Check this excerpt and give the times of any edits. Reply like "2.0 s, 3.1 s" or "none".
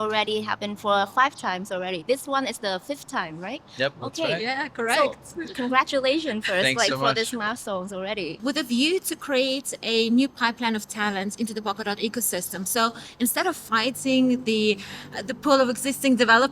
8.3 s